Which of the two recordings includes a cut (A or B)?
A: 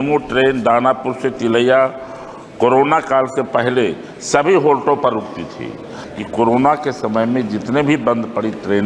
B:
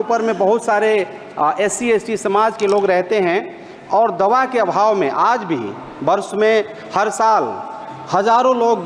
A